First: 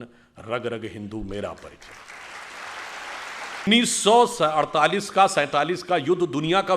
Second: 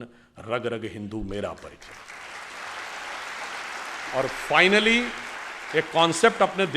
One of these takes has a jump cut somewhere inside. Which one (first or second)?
first